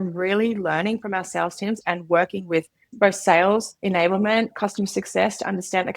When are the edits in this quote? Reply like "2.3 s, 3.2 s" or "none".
2.8 s, 3.7 s